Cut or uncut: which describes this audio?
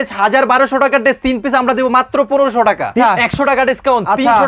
cut